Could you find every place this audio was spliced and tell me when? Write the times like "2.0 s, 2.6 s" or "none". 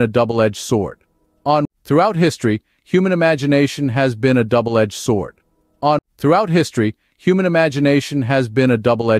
1.6 s, 6.0 s